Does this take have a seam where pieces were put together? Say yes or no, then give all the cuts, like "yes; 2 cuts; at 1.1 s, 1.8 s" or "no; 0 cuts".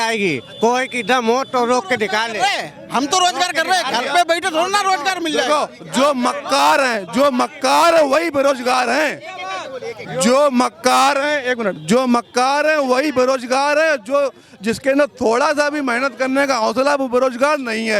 no; 0 cuts